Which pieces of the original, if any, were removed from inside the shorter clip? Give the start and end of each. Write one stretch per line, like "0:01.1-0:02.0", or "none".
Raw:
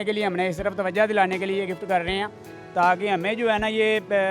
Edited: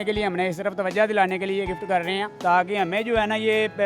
0:02.3-0:02.6